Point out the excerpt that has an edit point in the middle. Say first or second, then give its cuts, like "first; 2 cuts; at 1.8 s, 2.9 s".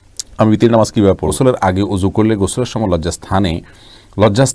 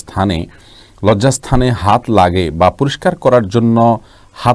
first; 1 cut; at 1.3 s